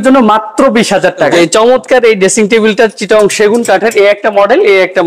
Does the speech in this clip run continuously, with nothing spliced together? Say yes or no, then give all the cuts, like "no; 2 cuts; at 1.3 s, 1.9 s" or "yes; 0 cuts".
no; 1 cut; at 1.3 s